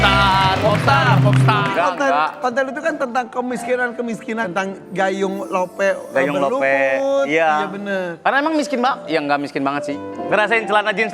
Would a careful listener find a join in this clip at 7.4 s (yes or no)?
no